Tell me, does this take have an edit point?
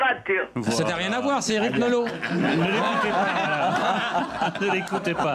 no; 0 cuts

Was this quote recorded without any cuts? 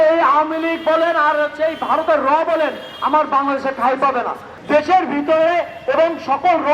no; 1 cut; at 4.5 s

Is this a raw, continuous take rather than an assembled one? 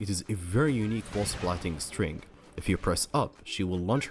yes; 0 cuts

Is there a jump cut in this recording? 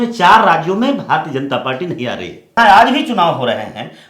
yes; 1 cut; at 2.5 s

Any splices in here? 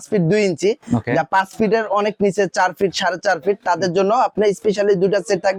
no; 0 cuts

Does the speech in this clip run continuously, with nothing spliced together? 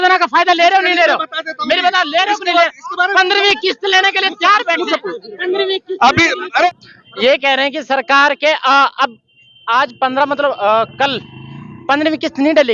no; 1 cut; at 6.7 s

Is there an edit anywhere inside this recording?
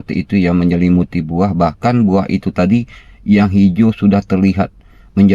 no; 0 cuts

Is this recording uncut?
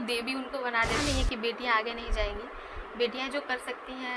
no; 1 cut; at 1.0 s

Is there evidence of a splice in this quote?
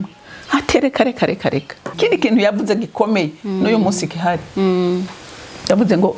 yes; 1 cut; at 1.9 s

